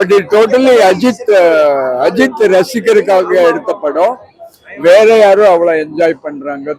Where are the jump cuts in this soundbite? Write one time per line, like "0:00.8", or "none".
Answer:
none